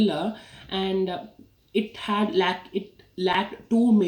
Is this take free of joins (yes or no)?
yes